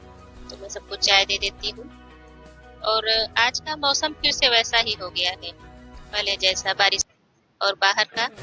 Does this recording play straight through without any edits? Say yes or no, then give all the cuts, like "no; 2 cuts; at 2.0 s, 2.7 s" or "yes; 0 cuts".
no; 1 cut; at 7.0 s